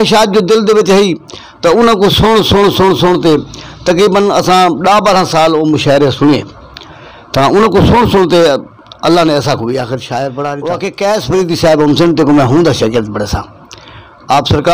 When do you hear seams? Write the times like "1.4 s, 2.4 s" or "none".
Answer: 10.7 s